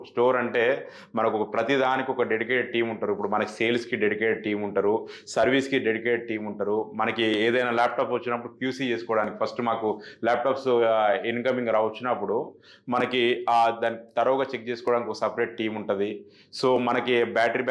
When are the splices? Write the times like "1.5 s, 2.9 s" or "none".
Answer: none